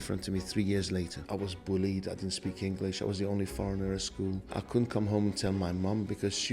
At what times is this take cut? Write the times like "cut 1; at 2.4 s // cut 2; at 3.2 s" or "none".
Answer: cut 1; at 1.2 s // cut 2; at 4.5 s